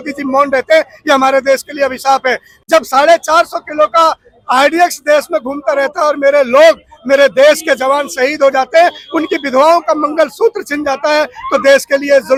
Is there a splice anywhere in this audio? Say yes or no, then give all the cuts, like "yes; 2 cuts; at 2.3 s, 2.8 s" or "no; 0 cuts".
no; 0 cuts